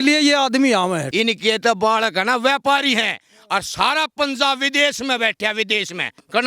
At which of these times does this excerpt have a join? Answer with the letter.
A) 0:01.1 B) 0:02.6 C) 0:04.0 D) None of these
A